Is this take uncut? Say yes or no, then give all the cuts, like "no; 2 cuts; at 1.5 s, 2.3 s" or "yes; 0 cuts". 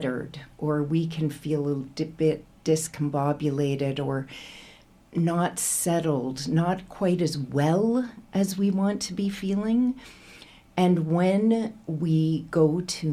yes; 0 cuts